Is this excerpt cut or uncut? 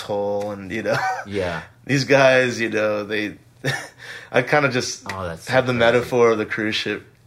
uncut